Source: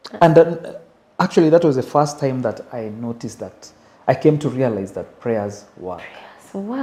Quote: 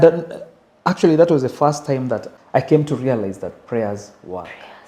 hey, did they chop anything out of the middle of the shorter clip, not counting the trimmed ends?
yes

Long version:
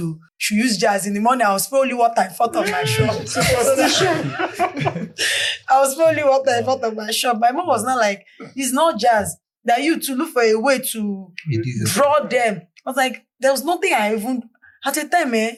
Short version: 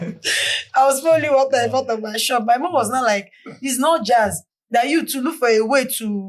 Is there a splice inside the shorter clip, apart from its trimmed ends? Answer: no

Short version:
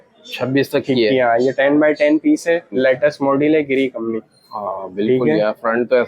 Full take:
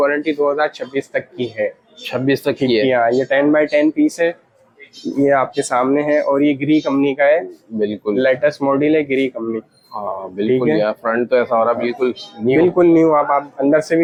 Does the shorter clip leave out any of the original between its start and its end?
yes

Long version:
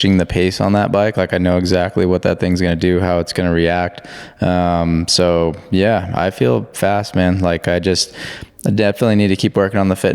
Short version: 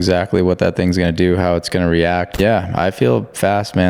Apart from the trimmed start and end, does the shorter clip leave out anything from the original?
yes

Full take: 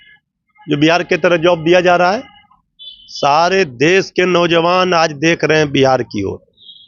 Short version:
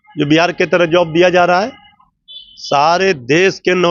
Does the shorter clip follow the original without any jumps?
yes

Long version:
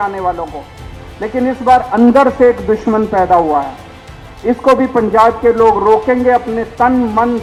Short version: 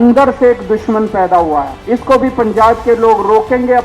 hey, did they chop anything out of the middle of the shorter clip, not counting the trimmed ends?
yes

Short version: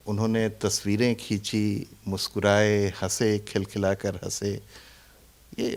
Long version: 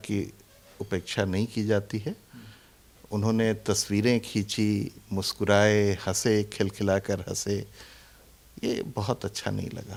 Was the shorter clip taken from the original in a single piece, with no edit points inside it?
yes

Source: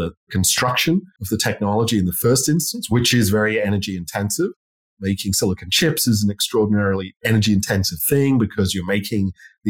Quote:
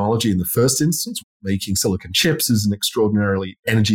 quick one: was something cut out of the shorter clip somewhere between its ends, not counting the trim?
yes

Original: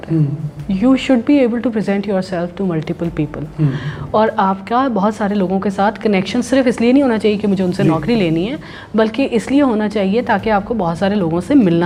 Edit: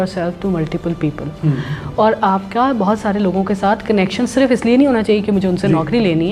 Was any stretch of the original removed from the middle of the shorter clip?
no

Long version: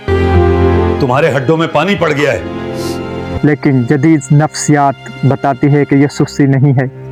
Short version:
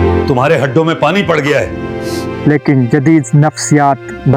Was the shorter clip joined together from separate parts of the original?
yes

